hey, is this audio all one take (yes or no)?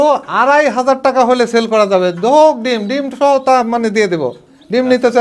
yes